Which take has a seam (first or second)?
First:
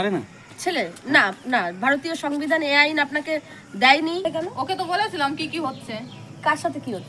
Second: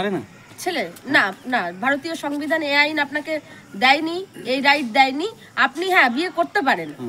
first